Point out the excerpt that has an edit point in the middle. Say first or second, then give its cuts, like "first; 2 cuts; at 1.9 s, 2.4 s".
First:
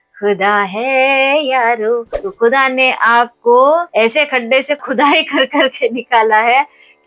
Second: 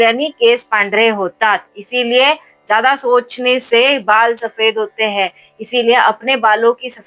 first; 1 cut; at 2.2 s